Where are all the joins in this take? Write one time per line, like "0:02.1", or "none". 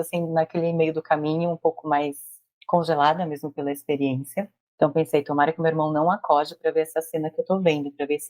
0:04.6

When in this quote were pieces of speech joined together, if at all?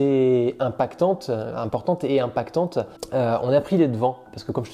0:03.0

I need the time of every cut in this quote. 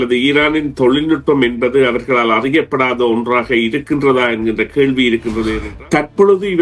0:05.6

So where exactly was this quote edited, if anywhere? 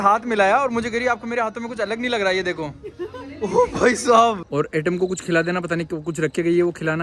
0:04.4

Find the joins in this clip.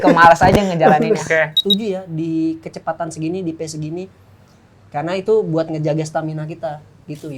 0:01.6

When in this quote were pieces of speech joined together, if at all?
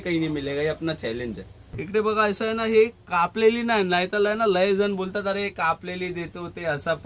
0:01.8

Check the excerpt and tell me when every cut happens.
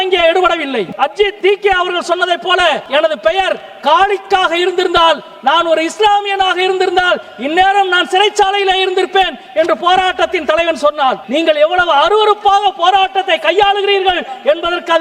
0:01.0
0:02.8
0:11.2

